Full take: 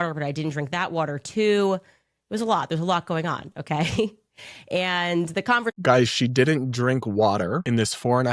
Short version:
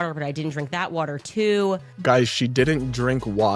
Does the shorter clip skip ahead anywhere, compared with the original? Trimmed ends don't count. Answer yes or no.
yes